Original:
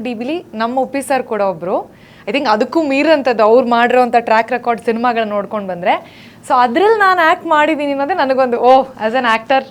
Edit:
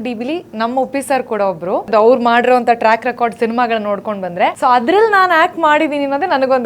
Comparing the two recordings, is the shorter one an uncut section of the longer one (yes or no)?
no